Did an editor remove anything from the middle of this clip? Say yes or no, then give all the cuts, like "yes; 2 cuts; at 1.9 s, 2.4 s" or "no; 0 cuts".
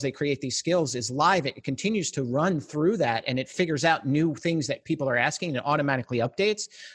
no; 0 cuts